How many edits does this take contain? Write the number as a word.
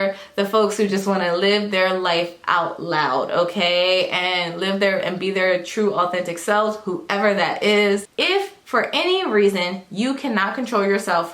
one